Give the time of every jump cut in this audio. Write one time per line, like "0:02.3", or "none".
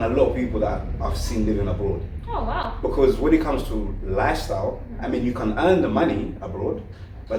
none